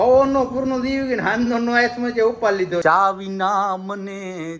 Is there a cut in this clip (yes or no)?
yes